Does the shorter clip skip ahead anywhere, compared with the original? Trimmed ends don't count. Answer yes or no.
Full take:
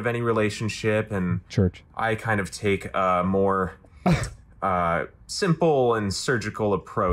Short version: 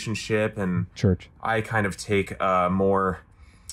no